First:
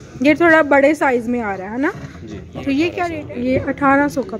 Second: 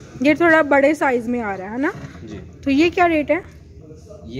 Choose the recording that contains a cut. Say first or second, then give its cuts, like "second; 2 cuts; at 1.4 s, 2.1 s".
first; 1 cut; at 3.2 s